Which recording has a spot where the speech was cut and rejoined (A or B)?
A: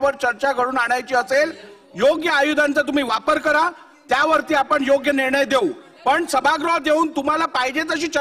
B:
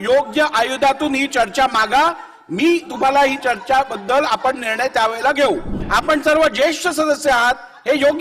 B